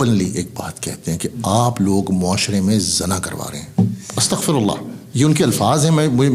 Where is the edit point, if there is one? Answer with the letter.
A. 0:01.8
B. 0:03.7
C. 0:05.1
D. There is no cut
D